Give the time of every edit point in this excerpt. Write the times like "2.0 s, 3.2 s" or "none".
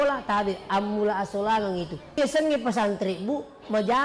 2.2 s